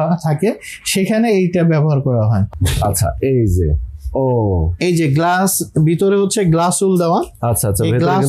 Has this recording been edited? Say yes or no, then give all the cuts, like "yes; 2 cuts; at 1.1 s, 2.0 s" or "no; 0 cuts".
yes; 1 cut; at 2.4 s